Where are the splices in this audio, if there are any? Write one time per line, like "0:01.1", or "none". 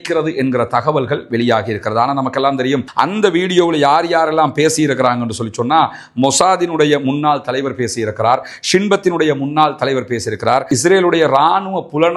0:02.9